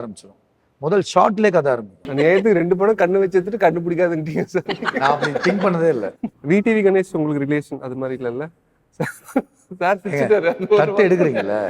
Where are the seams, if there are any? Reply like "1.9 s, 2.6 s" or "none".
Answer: 2.0 s, 6.3 s